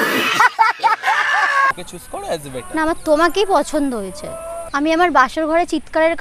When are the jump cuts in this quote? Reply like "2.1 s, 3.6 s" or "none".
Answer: 1.7 s